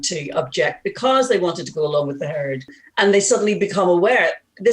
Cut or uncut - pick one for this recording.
cut